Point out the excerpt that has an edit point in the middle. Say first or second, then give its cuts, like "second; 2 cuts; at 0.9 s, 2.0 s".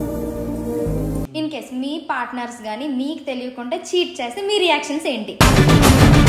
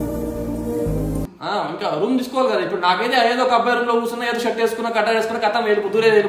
first; 1 cut; at 1.3 s